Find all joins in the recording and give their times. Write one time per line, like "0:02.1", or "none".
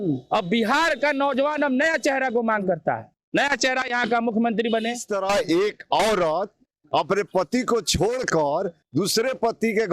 0:05.0